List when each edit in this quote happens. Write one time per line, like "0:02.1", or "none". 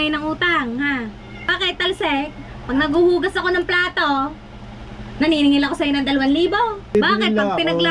0:01.5
0:06.8

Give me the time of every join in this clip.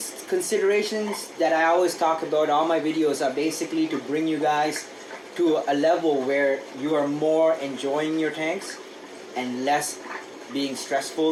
none

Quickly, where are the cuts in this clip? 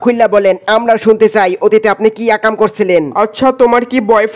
0:03.1

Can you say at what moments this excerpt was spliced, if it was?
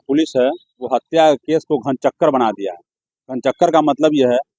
none

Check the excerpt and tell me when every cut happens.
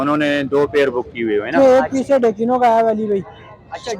0:01.5

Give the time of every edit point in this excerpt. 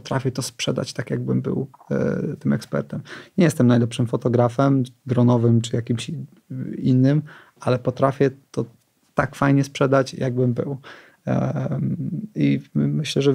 none

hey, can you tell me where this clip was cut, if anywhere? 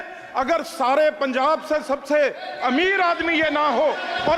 none

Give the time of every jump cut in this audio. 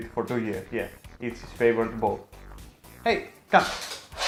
none

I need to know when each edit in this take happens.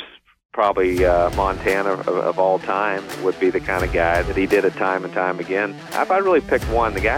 0:03.1
0:04.3
0:05.9

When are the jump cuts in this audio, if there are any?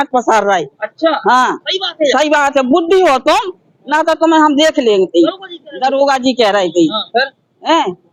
none

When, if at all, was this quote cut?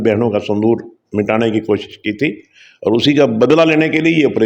none

